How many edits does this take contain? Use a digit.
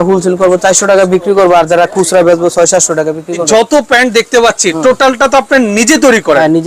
1